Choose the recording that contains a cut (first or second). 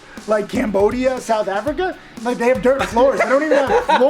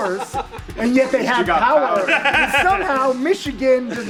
first